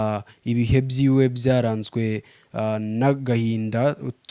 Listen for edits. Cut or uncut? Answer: uncut